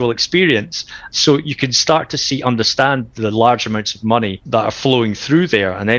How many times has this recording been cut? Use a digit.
2